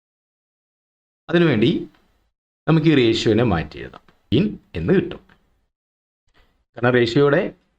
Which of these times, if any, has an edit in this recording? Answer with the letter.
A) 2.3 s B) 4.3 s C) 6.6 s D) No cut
B